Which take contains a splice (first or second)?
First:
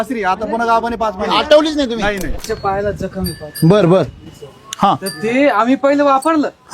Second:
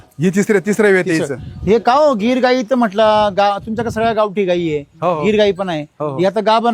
first